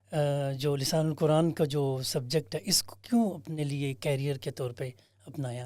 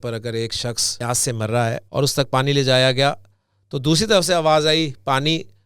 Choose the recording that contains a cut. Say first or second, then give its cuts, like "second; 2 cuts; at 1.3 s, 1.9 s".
second; 2 cuts; at 0.9 s, 1.9 s